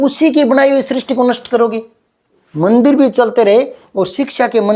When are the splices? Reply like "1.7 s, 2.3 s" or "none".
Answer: 2.4 s